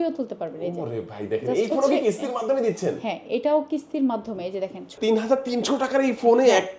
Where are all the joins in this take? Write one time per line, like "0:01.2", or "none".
0:05.0